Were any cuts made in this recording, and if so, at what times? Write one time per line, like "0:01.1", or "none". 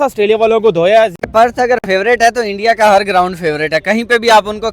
0:01.2